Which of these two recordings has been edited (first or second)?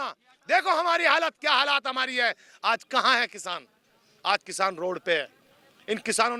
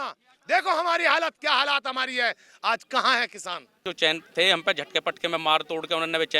second